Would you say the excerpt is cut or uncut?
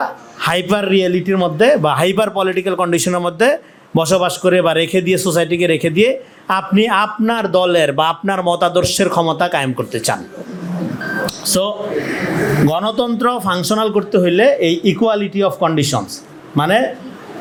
uncut